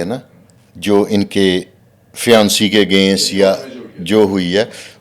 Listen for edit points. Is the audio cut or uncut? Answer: uncut